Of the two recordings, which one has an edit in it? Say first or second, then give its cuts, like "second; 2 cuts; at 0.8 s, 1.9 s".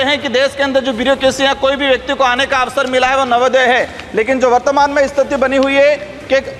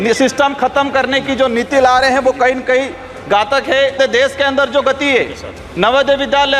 second; 1 cut; at 4.0 s